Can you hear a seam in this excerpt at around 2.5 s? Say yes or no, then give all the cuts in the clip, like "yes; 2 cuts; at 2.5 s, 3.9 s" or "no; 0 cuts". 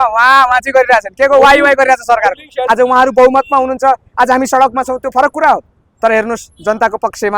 yes; 1 cut; at 2.5 s